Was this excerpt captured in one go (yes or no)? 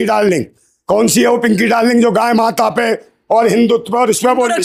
yes